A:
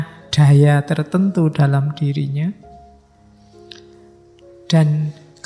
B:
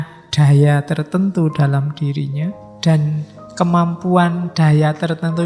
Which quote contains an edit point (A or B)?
B